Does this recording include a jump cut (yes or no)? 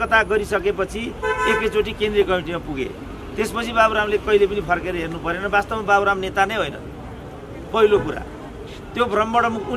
no